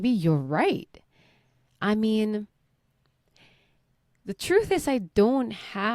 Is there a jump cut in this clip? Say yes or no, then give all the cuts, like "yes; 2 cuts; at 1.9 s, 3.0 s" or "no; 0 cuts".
no; 0 cuts